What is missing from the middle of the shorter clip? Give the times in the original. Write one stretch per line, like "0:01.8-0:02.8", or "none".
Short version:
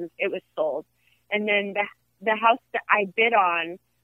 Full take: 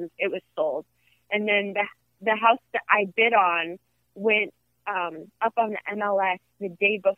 none